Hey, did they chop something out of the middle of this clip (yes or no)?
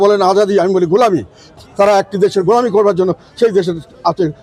no